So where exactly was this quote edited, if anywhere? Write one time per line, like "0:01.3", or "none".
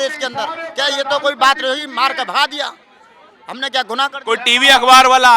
none